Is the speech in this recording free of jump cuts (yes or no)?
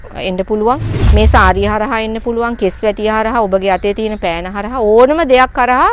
no